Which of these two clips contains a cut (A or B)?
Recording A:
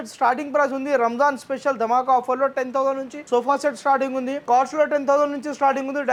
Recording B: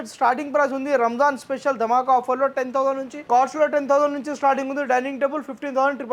B